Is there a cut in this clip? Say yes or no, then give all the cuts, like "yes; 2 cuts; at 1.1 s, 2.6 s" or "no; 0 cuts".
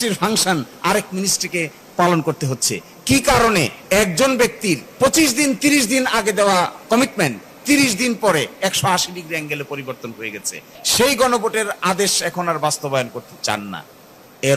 yes; 4 cuts; at 3.8 s, 4.9 s, 6.8 s, 10.8 s